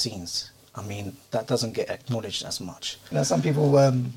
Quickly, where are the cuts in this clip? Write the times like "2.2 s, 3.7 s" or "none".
3.0 s